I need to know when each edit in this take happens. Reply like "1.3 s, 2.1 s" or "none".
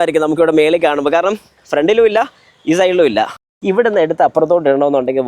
3.5 s